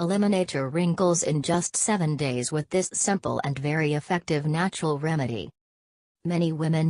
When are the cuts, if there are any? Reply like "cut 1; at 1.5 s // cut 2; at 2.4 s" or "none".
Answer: cut 1; at 1.2 s